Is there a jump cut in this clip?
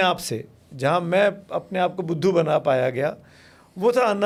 no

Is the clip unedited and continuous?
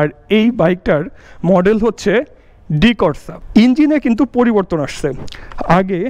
no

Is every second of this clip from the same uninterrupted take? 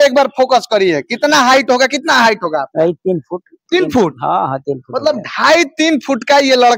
yes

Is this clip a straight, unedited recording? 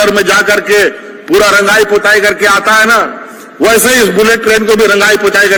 yes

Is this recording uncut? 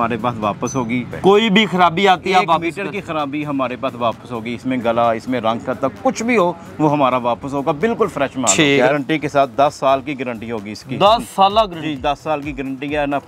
no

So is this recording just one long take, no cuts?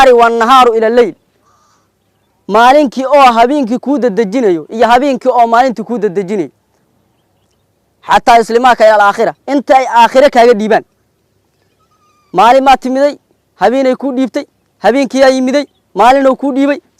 yes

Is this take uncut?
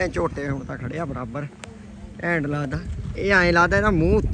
yes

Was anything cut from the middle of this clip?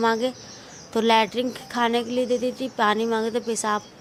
no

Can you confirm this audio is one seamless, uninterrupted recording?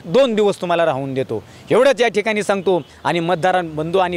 yes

